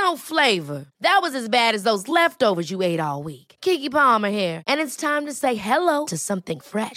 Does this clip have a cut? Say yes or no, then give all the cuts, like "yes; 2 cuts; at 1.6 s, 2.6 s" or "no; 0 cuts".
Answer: no; 0 cuts